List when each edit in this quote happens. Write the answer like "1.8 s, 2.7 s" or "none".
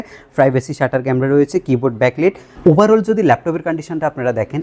2.5 s